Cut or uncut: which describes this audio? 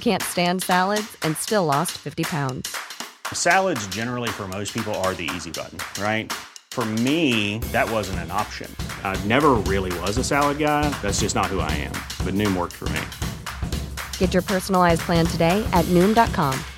uncut